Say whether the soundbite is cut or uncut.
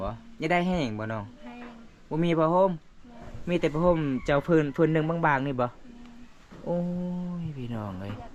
uncut